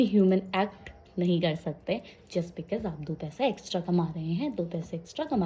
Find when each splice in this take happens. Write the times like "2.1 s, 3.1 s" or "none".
none